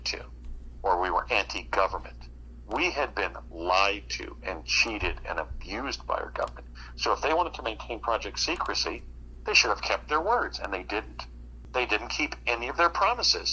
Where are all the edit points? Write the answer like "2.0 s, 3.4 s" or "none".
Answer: 11.5 s